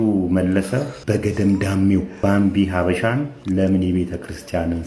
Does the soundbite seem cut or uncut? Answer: cut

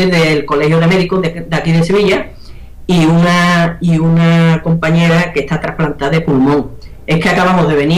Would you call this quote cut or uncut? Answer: cut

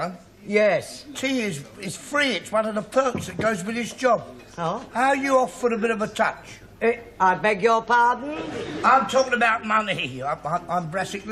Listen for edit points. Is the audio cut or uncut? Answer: cut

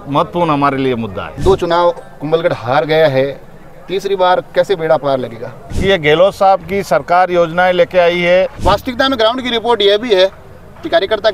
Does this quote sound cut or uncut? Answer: cut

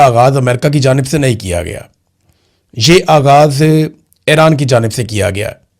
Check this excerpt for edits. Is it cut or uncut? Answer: uncut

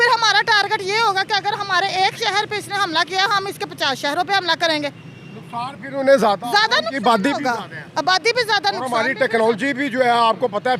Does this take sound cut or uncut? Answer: uncut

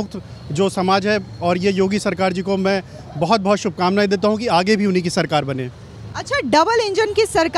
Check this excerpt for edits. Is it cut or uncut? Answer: uncut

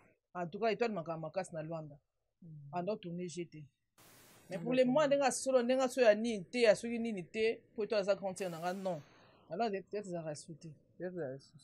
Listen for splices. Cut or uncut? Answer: uncut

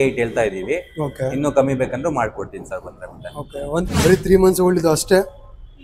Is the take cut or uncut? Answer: cut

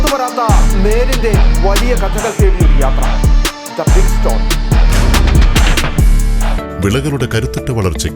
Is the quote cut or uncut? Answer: cut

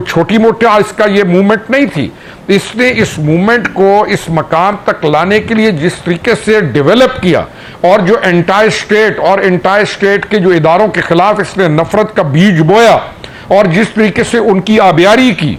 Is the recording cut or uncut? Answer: uncut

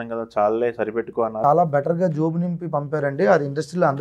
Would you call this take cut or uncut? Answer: cut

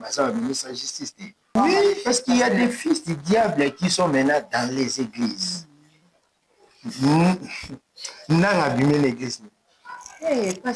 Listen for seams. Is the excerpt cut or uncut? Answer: cut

